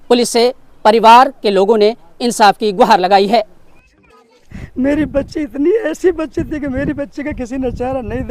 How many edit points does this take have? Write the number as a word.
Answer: one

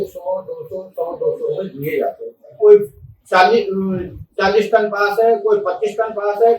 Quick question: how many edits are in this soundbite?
one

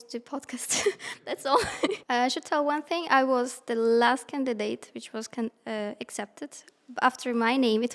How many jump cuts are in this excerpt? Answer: one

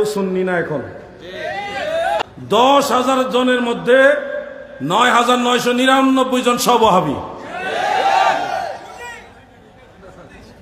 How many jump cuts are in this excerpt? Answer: one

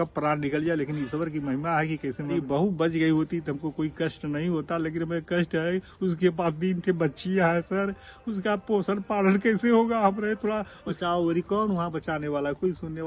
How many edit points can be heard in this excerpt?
two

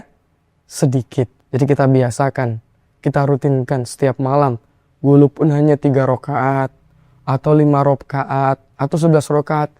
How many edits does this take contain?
one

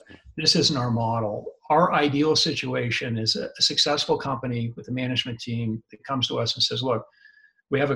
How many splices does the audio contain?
zero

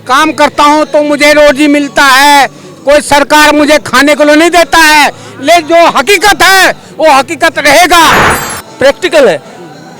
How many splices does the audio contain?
one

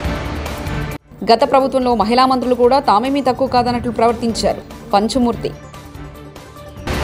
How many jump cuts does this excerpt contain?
one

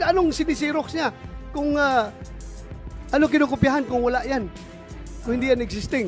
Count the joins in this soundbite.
zero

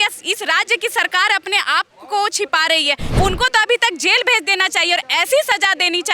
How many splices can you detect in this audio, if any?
one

